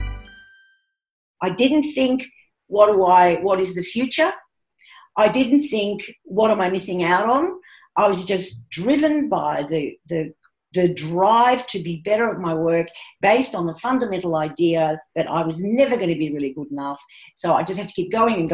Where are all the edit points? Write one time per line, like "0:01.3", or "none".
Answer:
0:01.3

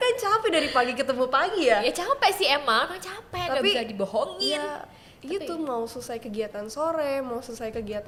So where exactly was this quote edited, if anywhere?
none

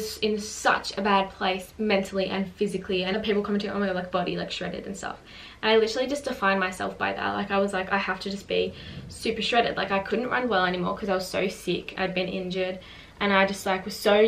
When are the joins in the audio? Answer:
0:03.1

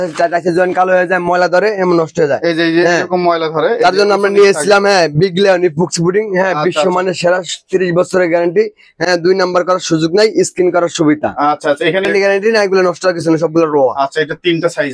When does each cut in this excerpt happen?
0:12.0

